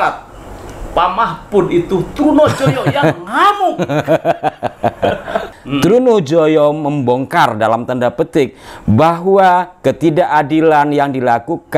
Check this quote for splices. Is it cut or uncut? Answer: cut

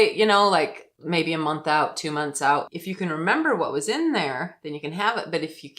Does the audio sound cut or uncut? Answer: cut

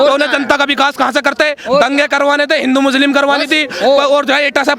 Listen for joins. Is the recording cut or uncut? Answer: uncut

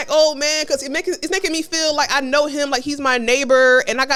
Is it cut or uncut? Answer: uncut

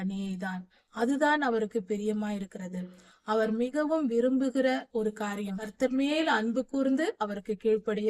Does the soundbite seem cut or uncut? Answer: cut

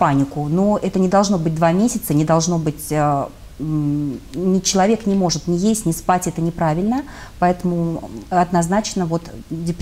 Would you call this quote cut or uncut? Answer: uncut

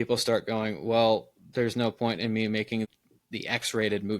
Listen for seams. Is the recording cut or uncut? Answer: cut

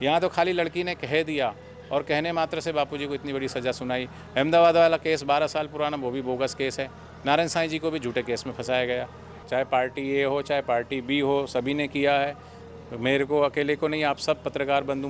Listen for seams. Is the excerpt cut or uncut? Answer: cut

